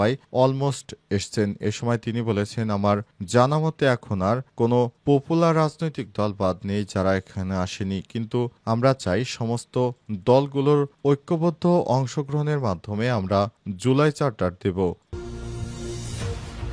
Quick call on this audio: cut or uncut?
cut